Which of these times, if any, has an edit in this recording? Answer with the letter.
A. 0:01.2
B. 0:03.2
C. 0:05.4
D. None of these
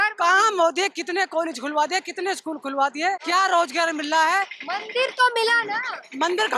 B